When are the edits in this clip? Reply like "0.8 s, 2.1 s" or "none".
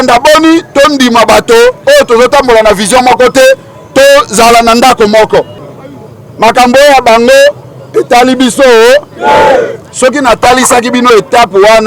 5.6 s

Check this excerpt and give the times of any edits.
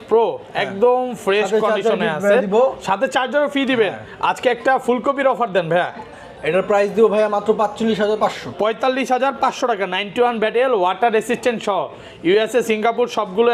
none

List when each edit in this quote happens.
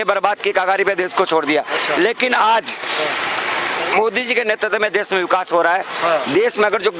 none

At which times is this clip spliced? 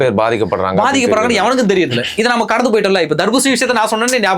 none

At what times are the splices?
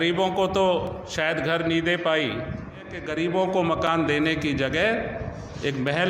3.0 s

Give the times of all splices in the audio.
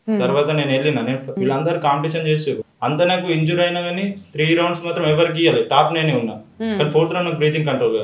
1.3 s, 2.7 s

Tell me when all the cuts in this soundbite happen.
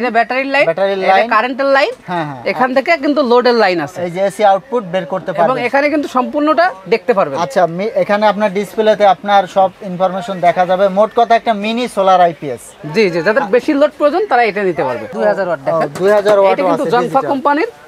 none

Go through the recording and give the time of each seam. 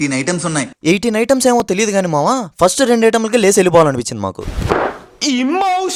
none

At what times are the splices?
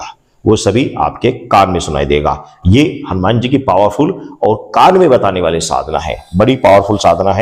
none

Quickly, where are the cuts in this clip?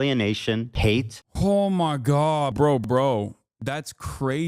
1.1 s, 2.5 s, 3.5 s

